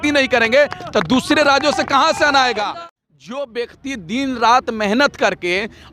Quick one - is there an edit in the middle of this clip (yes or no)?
yes